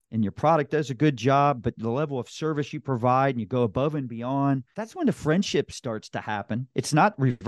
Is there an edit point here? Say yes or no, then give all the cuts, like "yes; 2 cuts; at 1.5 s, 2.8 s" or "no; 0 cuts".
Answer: yes; 1 cut; at 4.8 s